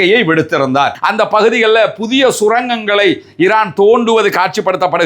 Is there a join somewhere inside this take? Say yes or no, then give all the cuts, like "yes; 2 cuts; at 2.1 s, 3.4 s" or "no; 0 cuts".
yes; 1 cut; at 0.9 s